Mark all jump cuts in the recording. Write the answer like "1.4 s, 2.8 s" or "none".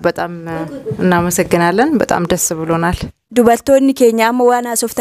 3.2 s